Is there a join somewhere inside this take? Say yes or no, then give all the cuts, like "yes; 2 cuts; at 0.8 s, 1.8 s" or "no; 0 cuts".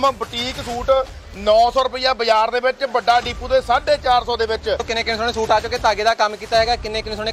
yes; 1 cut; at 4.9 s